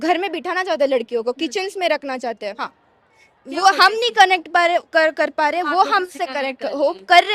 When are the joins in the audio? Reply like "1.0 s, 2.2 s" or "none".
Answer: 2.6 s